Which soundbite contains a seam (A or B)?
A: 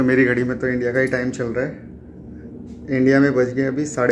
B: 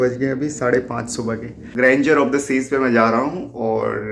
B